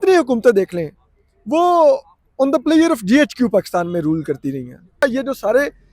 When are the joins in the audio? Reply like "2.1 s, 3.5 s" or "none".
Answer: 5.0 s